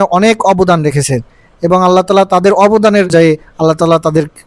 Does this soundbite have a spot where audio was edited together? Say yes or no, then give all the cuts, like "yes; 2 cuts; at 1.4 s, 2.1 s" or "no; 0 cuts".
yes; 1 cut; at 3.1 s